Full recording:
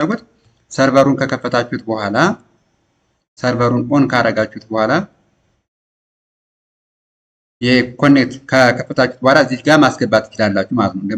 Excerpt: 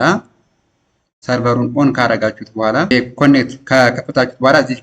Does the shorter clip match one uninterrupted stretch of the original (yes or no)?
no